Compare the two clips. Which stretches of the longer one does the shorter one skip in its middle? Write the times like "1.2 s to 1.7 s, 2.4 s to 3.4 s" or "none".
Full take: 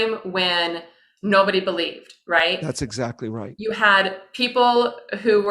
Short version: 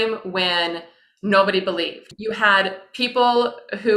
2.1 s to 3.5 s